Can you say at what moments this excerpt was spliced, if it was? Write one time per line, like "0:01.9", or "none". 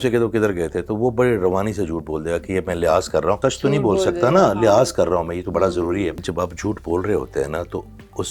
0:03.4
0:06.3